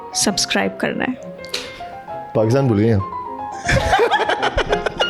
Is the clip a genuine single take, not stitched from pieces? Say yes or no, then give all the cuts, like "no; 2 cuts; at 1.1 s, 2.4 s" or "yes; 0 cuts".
yes; 0 cuts